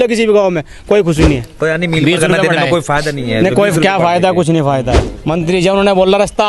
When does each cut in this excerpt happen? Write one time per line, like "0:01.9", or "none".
0:01.5
0:05.1